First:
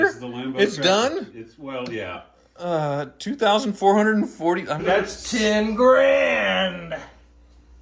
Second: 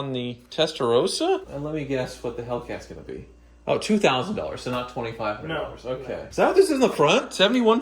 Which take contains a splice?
second; 1 cut; at 1.5 s

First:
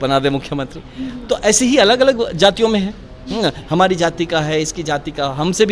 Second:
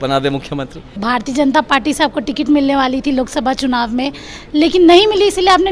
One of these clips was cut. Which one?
second; 1 cut; at 1.0 s

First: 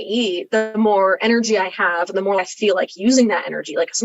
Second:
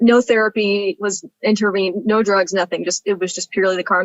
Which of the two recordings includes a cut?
first; 1 cut; at 2.4 s

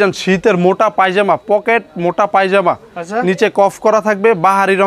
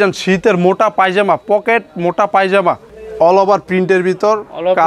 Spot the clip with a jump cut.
second; 1 cut; at 2.9 s

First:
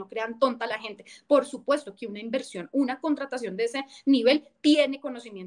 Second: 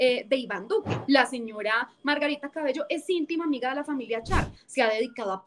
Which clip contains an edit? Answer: second; 2 cuts; at 0.9 s, 4.6 s

